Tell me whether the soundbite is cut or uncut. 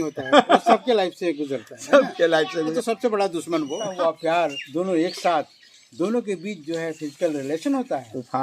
cut